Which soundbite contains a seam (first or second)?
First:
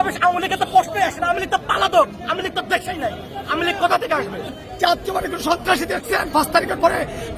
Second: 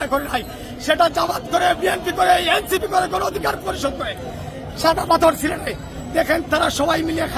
first